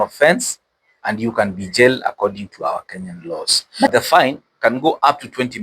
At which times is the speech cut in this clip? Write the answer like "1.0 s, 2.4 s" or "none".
3.9 s